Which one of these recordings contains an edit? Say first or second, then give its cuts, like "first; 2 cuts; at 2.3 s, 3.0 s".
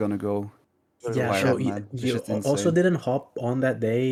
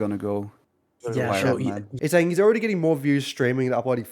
second; 1 cut; at 1.9 s